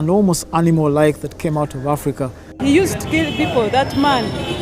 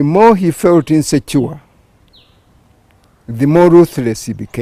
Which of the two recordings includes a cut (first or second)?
first